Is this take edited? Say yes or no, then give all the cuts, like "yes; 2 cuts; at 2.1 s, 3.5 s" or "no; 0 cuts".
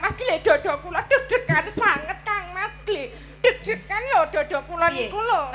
no; 0 cuts